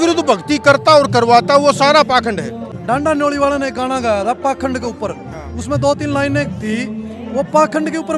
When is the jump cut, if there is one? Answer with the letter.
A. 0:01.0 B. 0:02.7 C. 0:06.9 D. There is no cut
B